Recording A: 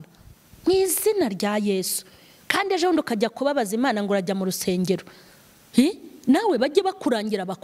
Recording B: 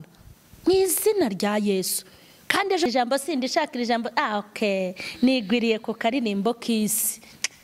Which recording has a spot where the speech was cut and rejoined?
B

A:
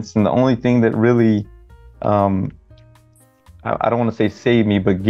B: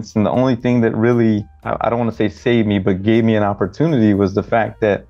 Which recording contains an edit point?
B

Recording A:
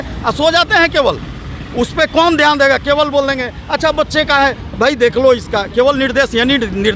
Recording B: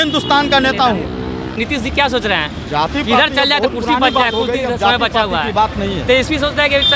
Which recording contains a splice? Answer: B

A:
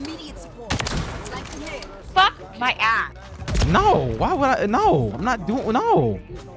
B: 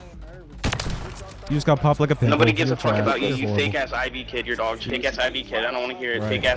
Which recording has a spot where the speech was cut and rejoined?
B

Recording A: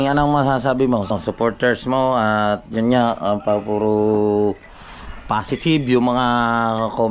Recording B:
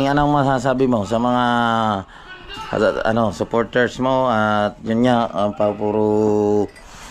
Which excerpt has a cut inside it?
A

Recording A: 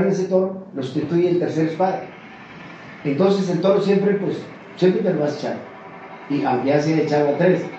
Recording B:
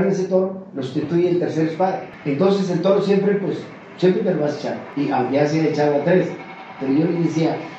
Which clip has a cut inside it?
B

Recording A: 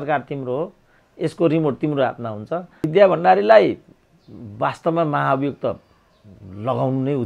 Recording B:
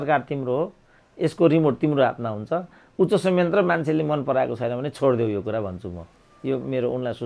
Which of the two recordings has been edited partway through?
A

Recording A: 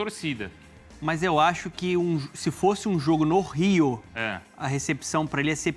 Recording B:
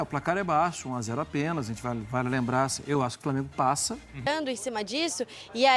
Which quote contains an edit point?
B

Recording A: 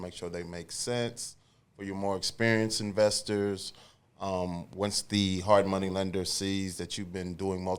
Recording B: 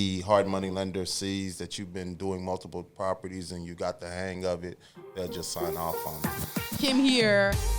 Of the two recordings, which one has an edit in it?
B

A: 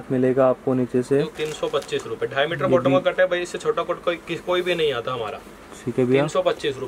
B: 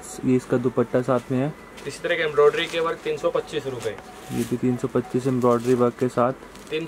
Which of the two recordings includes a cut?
A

